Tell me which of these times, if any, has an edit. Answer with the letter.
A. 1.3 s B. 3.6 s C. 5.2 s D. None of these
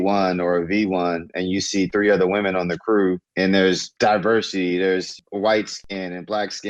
C